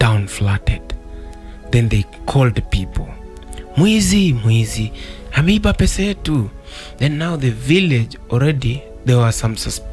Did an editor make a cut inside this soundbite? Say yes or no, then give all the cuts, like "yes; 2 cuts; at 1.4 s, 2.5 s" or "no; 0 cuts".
no; 0 cuts